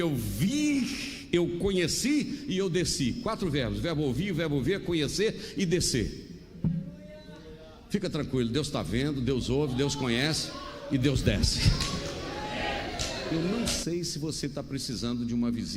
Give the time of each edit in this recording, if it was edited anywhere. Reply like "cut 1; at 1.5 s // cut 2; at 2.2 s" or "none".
cut 1; at 13.3 s